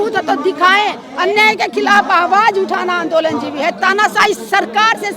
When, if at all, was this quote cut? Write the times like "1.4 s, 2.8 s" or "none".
1.1 s